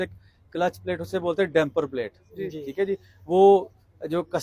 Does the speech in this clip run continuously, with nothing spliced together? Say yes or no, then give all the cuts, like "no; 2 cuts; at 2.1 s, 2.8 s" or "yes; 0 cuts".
yes; 0 cuts